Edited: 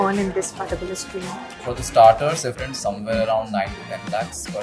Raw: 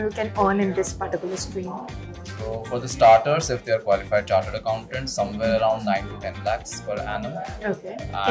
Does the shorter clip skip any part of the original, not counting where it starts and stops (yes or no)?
yes